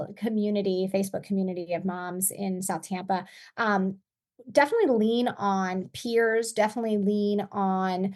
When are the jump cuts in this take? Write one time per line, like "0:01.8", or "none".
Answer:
none